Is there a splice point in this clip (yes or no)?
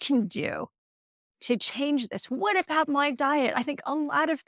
no